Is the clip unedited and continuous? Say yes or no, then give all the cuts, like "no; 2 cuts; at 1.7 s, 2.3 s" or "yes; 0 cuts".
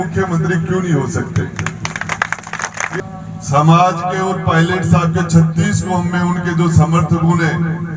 no; 1 cut; at 2.9 s